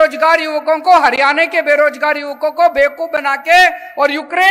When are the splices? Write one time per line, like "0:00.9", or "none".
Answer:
none